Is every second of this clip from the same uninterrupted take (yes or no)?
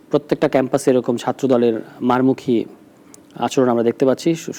yes